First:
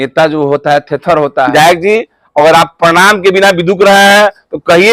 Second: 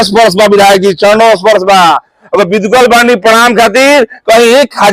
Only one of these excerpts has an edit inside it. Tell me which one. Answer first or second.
first